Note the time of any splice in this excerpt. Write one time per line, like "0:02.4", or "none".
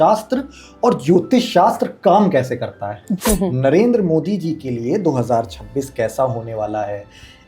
0:03.1

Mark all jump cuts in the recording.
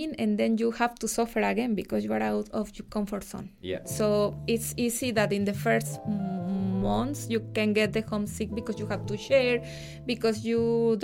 none

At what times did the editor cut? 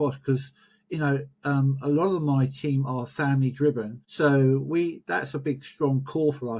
0:04.0

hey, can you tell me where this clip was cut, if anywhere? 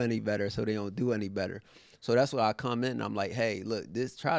none

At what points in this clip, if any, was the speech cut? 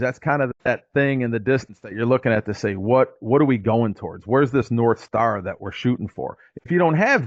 none

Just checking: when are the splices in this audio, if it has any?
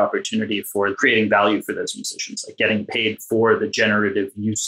0:00.9

